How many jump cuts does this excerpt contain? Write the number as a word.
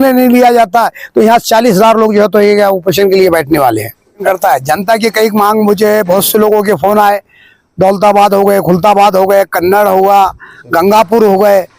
one